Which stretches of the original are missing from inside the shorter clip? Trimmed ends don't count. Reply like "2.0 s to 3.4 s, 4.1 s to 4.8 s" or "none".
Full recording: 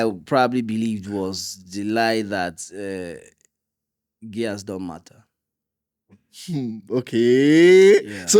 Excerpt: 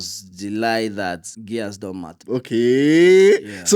2.6 s to 4.2 s, 5.1 s to 6.8 s